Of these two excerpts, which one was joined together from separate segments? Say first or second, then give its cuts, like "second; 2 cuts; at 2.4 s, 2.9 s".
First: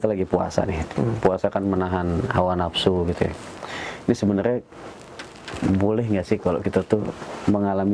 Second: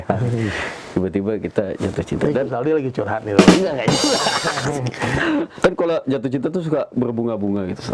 second; 1 cut; at 5.5 s